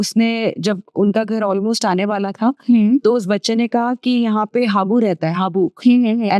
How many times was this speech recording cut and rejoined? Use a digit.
0